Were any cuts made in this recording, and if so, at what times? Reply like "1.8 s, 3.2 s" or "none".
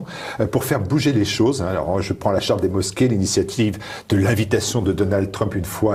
none